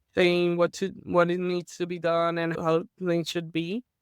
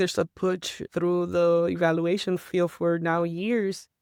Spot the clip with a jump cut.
first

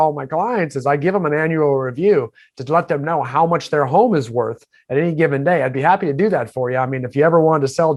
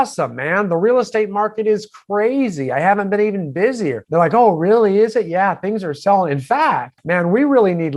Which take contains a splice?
second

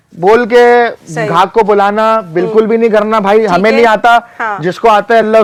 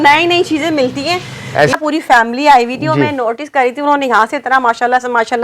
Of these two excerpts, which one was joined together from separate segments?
second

